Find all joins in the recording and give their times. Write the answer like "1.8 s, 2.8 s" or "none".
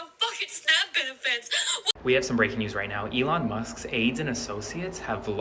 1.9 s